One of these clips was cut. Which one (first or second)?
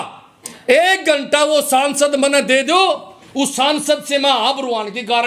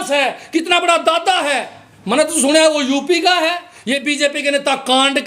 second